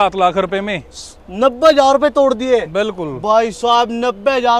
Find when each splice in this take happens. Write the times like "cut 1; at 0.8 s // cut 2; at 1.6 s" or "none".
none